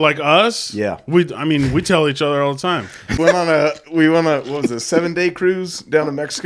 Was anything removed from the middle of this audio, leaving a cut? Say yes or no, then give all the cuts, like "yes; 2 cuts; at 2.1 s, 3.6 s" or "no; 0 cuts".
yes; 1 cut; at 3.2 s